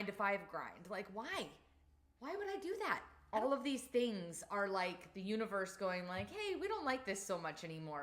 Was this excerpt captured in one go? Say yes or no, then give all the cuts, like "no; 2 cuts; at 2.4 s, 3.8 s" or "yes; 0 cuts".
no; 1 cut; at 3.1 s